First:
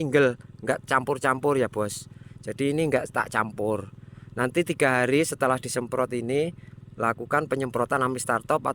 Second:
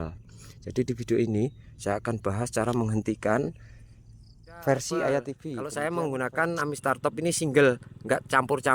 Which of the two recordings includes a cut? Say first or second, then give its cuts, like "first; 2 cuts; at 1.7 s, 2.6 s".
second; 1 cut; at 5.5 s